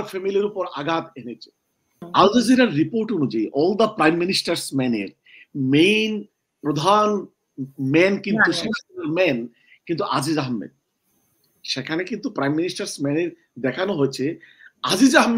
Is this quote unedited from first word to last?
no; 1 cut; at 2.1 s

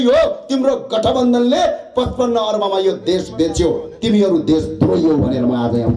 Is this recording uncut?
yes; 0 cuts

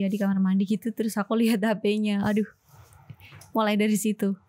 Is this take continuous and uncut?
yes; 0 cuts

